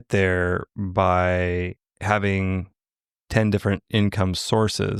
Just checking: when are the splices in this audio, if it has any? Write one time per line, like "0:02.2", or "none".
none